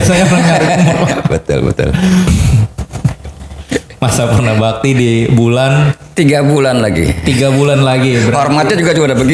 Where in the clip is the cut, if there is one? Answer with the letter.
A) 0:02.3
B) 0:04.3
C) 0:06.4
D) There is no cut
A